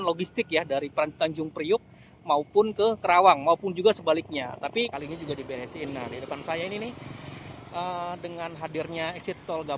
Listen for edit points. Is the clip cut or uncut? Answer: cut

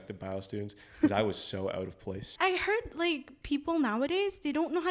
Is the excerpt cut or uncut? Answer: cut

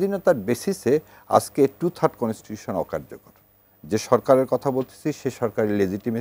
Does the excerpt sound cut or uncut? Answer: uncut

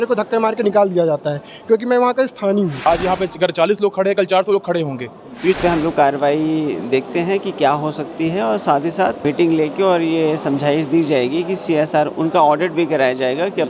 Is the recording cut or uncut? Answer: cut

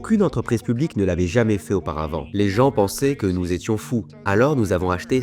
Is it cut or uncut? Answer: cut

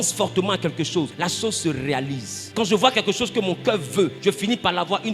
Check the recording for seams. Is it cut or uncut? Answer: cut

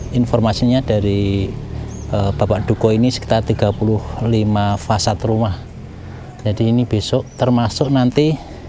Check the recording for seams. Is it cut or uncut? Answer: uncut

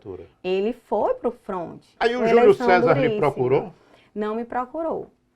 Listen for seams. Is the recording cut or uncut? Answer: cut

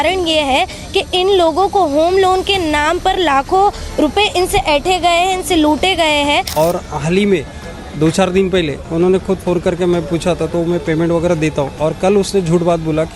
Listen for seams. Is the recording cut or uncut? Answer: cut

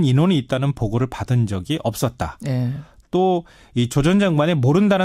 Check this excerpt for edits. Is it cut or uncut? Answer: cut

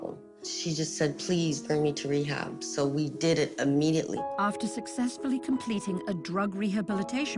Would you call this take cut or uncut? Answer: cut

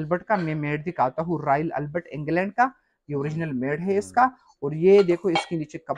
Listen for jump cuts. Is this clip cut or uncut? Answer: uncut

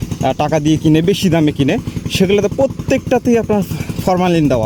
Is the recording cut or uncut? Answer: uncut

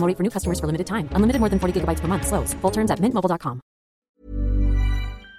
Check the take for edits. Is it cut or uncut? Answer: cut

